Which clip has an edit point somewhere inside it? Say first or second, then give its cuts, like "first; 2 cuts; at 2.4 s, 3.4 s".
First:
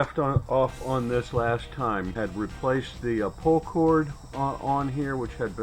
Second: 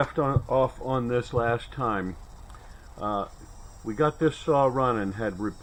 first; 1 cut; at 2.1 s